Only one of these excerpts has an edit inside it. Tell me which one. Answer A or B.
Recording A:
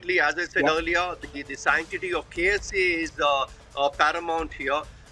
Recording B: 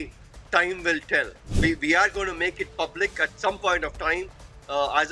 B